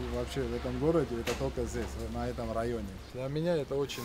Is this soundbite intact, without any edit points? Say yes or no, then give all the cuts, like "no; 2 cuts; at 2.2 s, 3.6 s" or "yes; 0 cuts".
no; 1 cut; at 3.1 s